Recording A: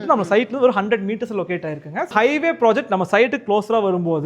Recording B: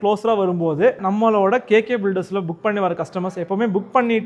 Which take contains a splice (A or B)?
A